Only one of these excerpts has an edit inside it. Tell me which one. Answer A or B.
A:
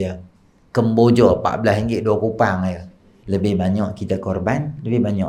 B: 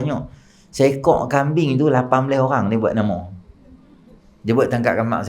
A